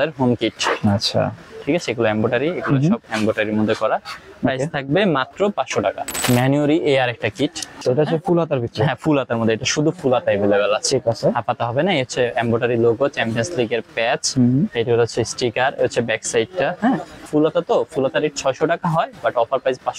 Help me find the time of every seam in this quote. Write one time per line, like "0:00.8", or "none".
0:01.4
0:06.1
0:07.8
0:17.2